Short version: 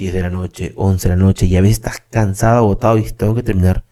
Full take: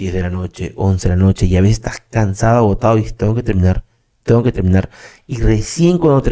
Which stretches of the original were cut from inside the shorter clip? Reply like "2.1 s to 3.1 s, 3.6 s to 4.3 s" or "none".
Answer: none